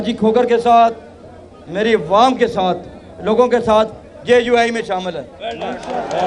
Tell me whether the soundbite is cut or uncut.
uncut